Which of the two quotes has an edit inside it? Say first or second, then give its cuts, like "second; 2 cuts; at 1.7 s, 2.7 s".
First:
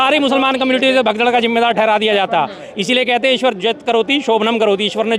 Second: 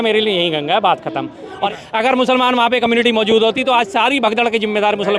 second; 1 cut; at 1.6 s